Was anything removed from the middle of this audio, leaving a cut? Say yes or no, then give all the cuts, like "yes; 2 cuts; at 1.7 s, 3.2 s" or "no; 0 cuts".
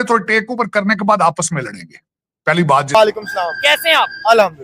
yes; 1 cut; at 2.9 s